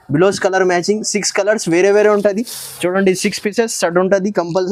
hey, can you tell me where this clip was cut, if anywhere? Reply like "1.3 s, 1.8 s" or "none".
none